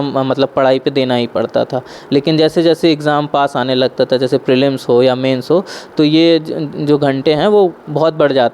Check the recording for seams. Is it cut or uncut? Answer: uncut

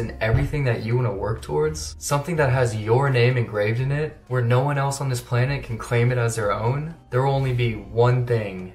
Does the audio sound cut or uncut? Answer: uncut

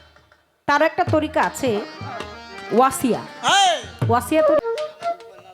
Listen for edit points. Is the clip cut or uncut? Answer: cut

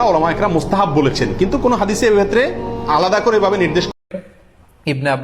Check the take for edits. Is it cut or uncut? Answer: cut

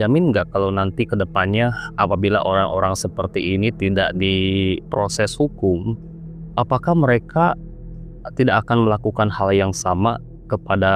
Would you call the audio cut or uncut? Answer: uncut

